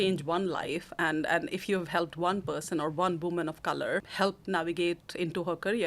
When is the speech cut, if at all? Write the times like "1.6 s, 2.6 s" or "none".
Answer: 4.1 s